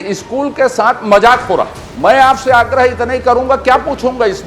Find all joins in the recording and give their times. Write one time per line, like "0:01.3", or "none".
0:01.8